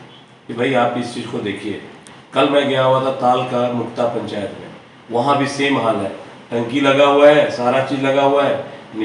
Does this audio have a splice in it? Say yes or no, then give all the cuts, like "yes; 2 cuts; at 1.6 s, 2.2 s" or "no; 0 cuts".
no; 0 cuts